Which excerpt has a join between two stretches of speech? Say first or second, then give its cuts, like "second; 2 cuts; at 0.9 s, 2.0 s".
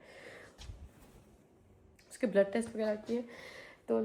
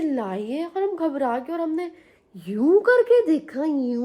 first; 1 cut; at 1.9 s